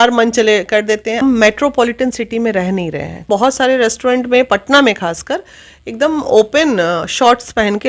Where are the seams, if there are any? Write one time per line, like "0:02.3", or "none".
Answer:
0:01.2
0:03.3